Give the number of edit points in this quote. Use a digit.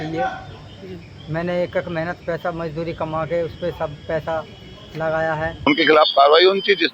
1